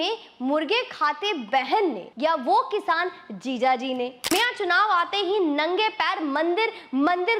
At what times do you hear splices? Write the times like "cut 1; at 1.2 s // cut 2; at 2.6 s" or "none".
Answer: cut 1; at 4.2 s

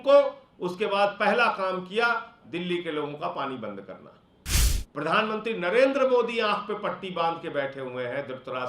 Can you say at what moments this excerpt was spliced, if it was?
cut 1; at 4.8 s

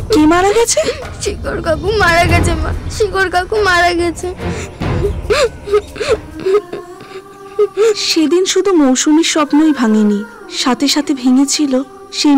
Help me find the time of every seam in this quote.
none

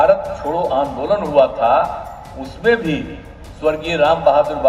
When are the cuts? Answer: none

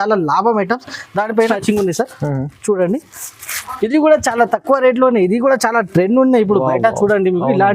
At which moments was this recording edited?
cut 1; at 1.5 s

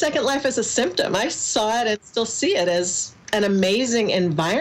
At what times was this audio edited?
none

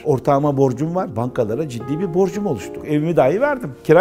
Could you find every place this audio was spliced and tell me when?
cut 1; at 1.1 s // cut 2; at 2.8 s

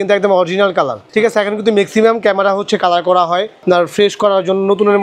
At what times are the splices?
none

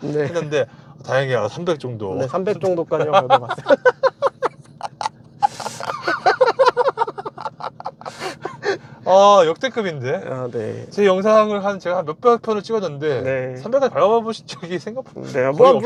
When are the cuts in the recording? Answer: none

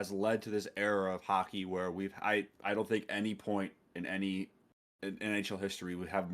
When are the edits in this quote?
none

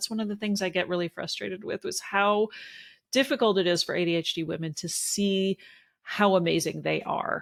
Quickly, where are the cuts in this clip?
none

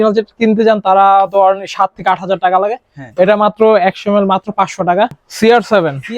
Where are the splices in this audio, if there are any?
cut 1; at 5.2 s

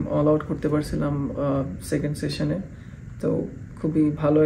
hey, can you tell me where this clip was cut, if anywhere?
none

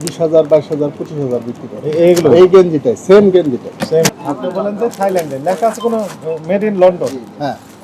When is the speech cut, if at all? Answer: cut 1; at 4.2 s

